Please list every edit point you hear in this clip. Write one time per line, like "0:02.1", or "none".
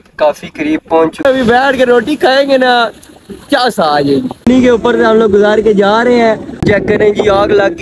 0:01.2
0:04.5
0:06.6

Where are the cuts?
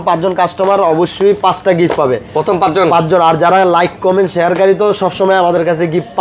none

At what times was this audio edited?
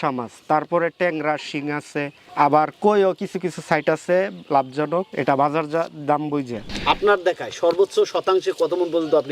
0:06.6

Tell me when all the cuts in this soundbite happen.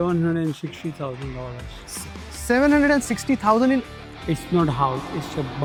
none

